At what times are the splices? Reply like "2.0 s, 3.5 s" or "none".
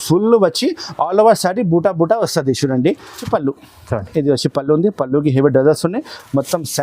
3.2 s